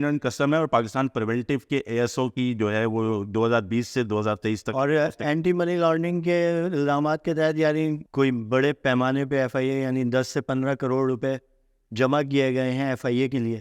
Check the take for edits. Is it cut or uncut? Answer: cut